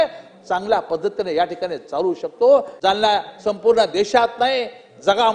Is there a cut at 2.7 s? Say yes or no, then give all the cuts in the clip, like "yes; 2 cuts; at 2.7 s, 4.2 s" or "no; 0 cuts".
yes; 1 cut; at 2.7 s